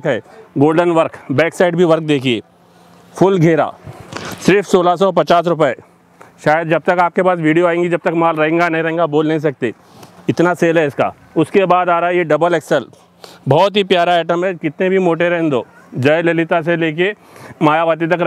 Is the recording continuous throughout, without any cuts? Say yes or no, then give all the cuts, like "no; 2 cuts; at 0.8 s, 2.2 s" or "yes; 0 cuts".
yes; 0 cuts